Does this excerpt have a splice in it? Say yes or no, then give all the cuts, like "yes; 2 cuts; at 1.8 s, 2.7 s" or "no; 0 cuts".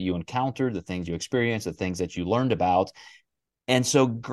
no; 0 cuts